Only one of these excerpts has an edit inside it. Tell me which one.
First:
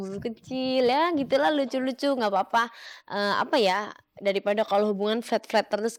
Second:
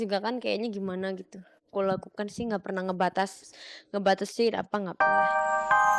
second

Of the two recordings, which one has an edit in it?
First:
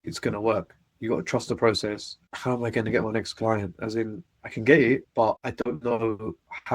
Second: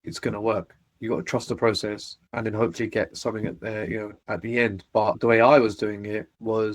first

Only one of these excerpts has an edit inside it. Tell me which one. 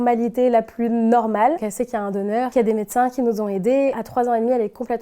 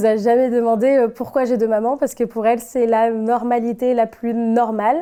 first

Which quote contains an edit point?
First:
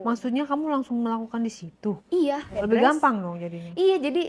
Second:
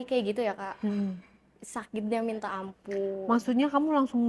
first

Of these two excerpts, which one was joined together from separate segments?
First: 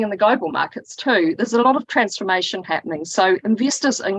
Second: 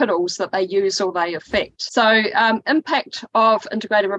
second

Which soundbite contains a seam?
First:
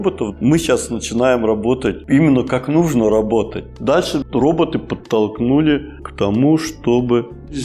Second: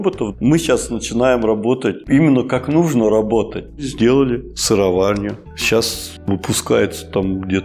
second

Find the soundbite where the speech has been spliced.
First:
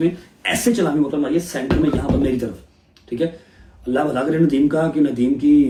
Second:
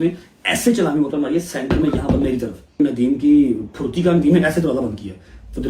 second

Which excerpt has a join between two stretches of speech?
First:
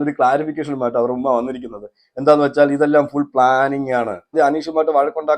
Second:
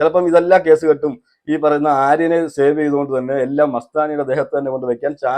first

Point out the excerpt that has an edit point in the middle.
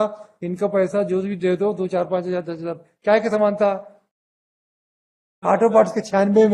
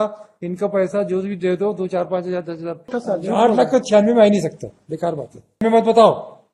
second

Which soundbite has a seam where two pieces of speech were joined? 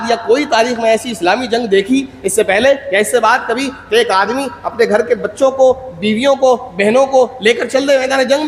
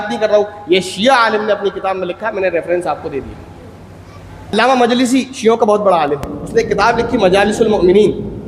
second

